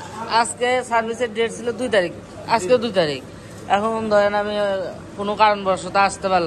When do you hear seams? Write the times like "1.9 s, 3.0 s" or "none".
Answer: none